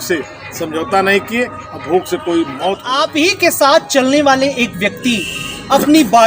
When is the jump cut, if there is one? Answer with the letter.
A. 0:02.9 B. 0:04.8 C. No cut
A